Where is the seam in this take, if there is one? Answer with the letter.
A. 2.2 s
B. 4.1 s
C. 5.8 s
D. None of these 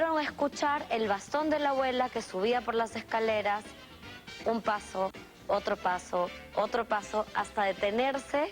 A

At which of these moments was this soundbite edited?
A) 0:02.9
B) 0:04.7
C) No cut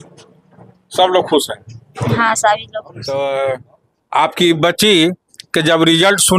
A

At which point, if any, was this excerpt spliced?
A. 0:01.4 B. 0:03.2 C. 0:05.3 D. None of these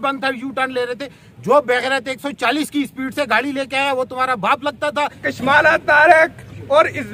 C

